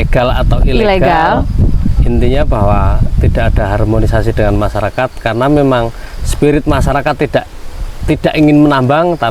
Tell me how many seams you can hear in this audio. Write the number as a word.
zero